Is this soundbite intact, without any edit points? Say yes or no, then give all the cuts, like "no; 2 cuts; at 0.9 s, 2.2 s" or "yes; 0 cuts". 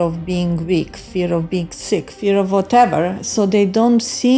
no; 1 cut; at 2.2 s